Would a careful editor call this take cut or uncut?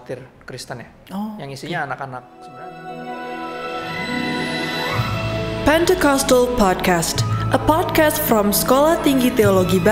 cut